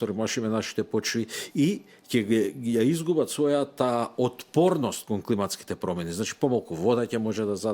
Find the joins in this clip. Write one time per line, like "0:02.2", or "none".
none